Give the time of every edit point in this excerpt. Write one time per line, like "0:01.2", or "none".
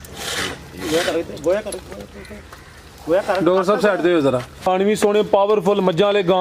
0:04.5

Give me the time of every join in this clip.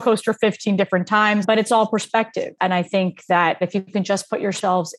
0:01.4
0:03.6

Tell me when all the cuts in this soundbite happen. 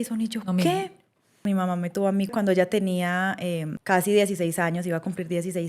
0:01.4
0:02.3
0:03.7

